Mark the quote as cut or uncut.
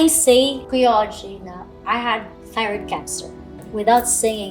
cut